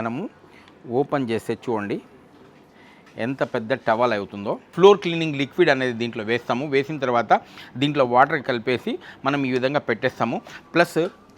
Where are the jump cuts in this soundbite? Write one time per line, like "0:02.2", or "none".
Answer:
0:04.7